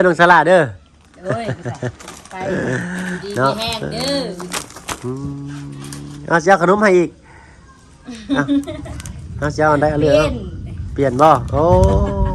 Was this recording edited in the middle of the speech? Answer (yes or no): no